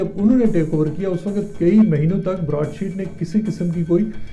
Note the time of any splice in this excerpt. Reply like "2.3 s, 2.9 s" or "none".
none